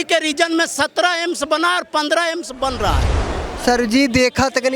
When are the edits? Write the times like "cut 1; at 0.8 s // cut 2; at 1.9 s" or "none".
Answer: cut 1; at 3.3 s

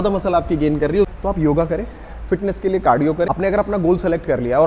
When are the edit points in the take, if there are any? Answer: cut 1; at 1.1 s // cut 2; at 3.3 s

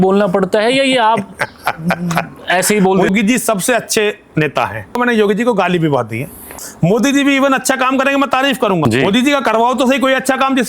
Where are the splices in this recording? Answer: cut 1; at 3.1 s // cut 2; at 4.9 s // cut 3; at 6.5 s // cut 4; at 8.8 s

